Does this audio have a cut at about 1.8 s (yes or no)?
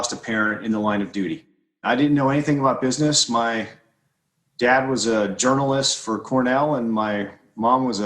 yes